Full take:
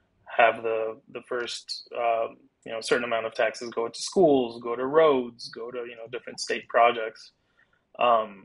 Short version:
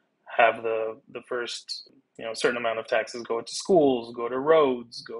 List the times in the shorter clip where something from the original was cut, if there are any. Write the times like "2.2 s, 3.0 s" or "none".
1.9 s